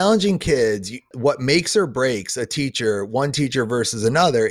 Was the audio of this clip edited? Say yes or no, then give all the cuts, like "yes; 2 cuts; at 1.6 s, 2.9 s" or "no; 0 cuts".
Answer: yes; 1 cut; at 1.1 s